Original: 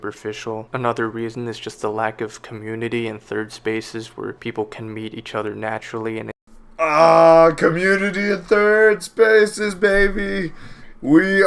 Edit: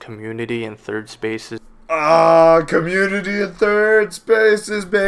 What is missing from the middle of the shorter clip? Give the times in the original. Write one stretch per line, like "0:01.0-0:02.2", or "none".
0:04.0-0:06.5